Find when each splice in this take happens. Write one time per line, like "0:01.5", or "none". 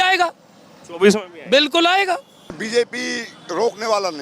0:02.6